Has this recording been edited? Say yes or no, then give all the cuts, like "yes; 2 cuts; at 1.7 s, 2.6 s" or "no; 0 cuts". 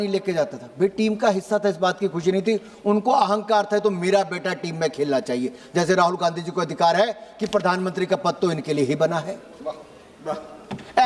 no; 0 cuts